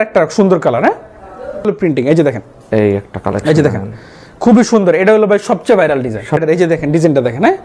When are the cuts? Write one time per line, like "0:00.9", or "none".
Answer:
0:01.6
0:06.4